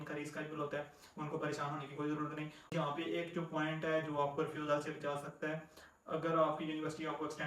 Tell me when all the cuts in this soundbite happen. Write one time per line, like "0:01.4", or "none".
0:02.7